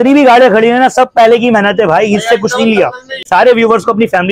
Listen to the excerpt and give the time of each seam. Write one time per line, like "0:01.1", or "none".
0:03.1